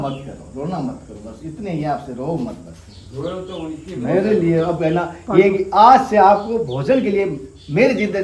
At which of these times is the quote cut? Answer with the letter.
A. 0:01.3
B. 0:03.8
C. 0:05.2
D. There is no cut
D